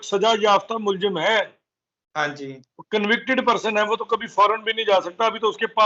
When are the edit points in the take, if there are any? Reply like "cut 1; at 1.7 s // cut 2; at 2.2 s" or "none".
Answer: none